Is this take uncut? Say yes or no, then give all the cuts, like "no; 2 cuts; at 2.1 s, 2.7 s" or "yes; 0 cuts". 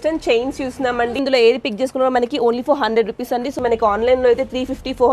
no; 2 cuts; at 1.2 s, 3.6 s